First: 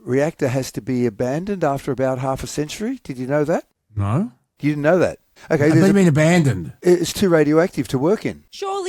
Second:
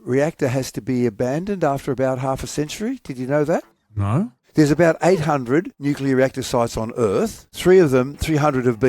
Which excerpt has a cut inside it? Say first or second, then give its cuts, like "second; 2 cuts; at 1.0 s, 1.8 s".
second; 3 cuts; at 4.4 s, 5.7 s, 7.5 s